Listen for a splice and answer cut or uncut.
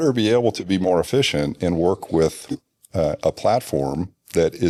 uncut